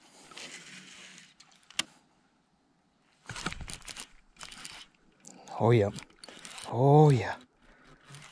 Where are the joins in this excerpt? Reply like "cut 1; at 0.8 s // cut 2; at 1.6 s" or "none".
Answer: cut 1; at 1.9 s